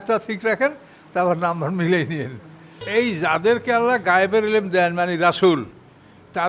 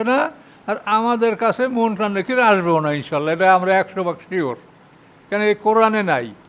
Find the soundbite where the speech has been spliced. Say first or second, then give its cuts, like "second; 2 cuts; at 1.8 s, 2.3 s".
first; 1 cut; at 2.8 s